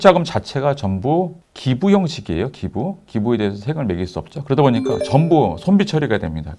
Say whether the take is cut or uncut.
uncut